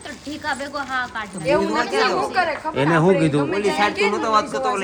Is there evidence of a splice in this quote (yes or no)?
no